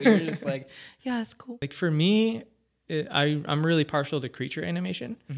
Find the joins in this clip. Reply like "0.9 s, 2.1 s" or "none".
1.6 s